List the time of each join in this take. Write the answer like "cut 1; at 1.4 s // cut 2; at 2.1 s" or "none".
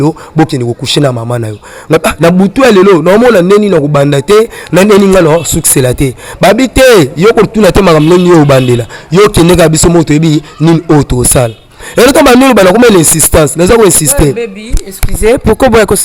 none